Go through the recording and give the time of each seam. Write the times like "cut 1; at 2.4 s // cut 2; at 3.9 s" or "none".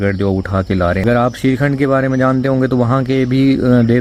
cut 1; at 1.0 s